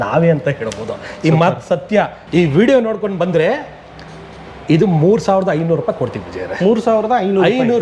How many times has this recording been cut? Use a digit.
1